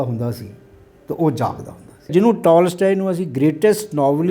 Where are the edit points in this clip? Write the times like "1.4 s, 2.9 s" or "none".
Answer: 2.1 s